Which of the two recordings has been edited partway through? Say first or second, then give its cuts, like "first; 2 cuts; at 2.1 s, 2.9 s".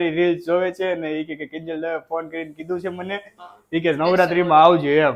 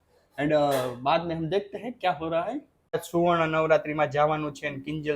second; 1 cut; at 3.0 s